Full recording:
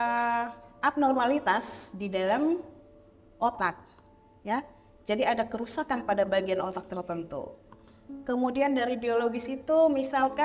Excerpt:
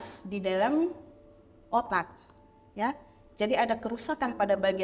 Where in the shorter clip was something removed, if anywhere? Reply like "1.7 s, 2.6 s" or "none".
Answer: none